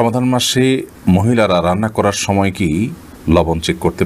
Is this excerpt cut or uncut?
uncut